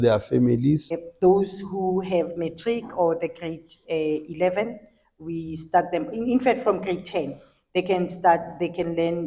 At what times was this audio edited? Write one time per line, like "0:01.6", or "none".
0:01.0